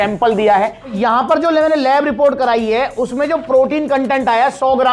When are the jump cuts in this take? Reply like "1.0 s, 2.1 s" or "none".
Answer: 1.0 s